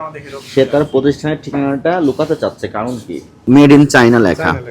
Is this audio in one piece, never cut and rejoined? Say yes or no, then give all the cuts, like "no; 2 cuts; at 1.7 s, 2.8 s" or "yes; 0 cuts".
no; 1 cut; at 3.4 s